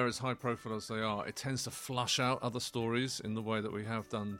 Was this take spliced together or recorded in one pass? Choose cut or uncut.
uncut